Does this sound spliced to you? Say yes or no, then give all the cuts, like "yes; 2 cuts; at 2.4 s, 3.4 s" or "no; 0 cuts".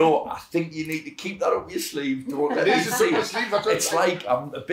no; 0 cuts